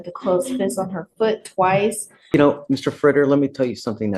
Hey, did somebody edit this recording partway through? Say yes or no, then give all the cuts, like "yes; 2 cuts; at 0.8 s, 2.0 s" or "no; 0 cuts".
yes; 1 cut; at 2.3 s